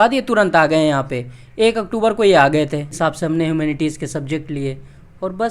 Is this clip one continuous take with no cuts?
no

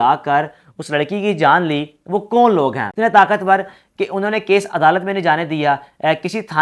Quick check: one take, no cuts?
no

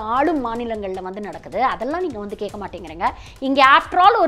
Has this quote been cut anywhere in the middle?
no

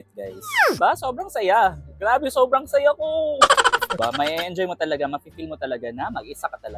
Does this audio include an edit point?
yes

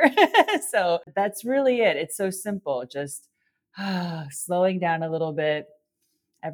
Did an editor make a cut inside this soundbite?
yes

